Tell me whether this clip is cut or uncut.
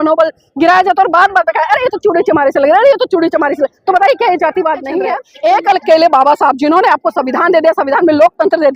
cut